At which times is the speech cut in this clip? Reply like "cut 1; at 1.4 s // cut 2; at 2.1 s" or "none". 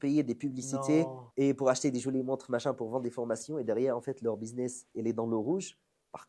cut 1; at 1.2 s